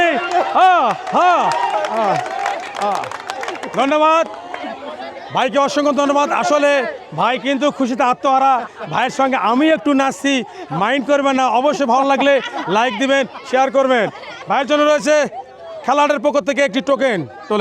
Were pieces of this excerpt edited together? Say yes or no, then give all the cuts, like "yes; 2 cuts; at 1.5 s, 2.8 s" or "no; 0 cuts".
no; 0 cuts